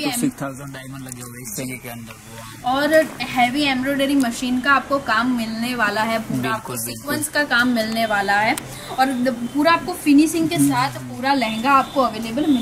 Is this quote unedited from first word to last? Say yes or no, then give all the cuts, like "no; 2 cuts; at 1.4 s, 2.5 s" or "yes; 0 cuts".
yes; 0 cuts